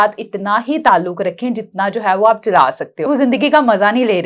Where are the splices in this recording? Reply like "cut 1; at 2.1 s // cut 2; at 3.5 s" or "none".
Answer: cut 1; at 3.1 s